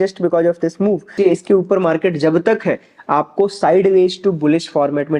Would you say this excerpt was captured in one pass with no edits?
no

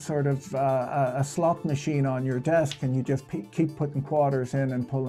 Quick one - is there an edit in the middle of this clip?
no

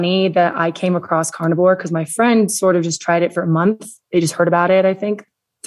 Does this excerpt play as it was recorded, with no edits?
yes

